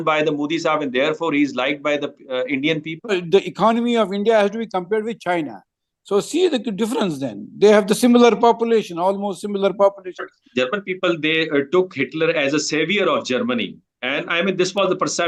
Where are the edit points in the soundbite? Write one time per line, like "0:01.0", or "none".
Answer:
0:03.1
0:10.4